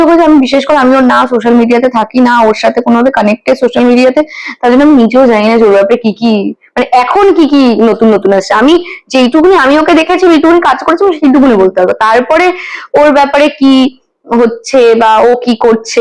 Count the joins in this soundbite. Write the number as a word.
zero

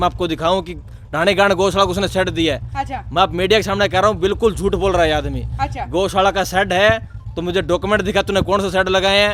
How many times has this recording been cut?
zero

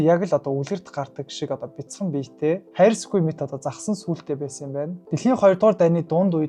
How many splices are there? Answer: one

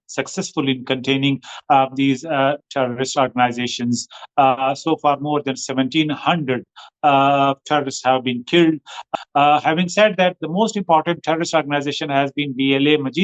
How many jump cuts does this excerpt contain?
one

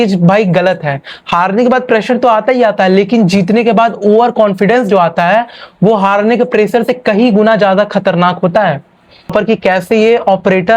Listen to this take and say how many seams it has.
one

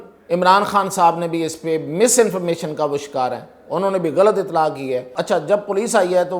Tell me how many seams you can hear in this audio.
one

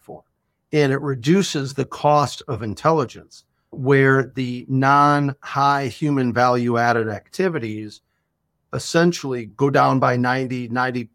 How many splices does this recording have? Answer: zero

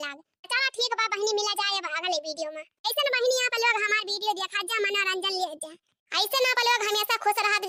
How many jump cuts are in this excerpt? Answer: zero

